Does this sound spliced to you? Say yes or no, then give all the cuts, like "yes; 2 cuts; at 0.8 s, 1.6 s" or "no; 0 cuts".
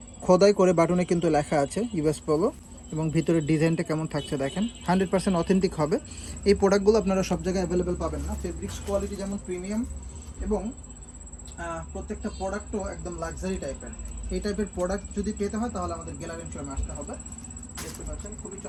no; 0 cuts